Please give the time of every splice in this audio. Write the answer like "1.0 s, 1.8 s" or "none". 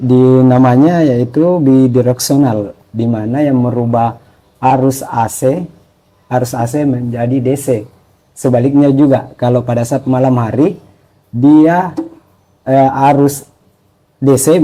none